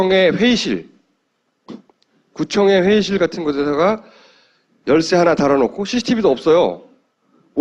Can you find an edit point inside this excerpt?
no; 0 cuts

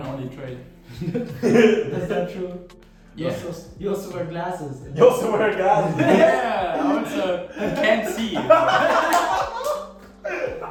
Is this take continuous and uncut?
yes; 0 cuts

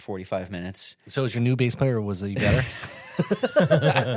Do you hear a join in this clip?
no; 0 cuts

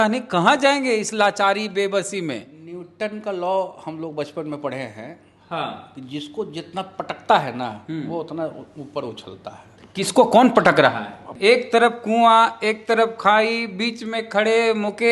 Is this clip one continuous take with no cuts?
no; 1 cut; at 11.3 s

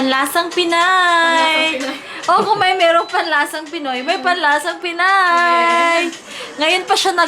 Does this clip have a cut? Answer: no; 0 cuts

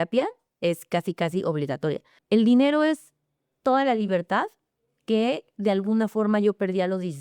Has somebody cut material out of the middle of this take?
yes; 1 cut; at 2.1 s

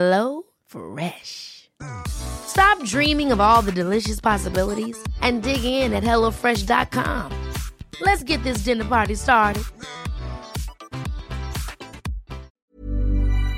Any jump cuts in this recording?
yes; 1 cut; at 12.6 s

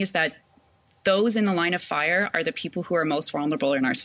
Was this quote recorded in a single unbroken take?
yes; 0 cuts

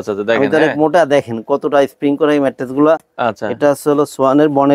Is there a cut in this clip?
no; 0 cuts

